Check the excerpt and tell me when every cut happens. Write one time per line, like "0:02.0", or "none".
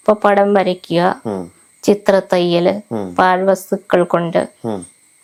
none

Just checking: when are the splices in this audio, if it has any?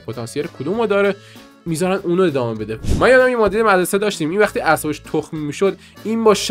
0:02.8

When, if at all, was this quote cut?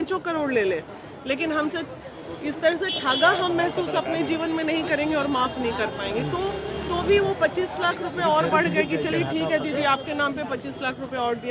none

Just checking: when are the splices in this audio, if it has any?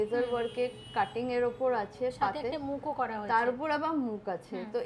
none

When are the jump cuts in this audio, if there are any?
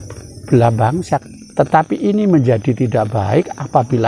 0:01.2

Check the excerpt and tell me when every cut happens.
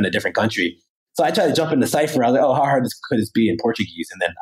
0:01.0

